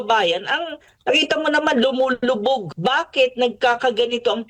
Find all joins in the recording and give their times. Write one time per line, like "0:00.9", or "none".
0:02.7